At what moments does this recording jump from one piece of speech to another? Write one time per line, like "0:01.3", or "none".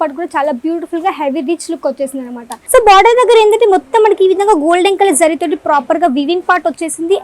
0:02.5